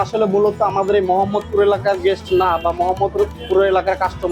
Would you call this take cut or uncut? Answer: uncut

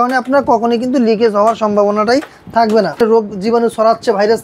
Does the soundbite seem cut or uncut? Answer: cut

